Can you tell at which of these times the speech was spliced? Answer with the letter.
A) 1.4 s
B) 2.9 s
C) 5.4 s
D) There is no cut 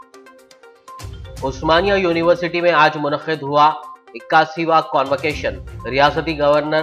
D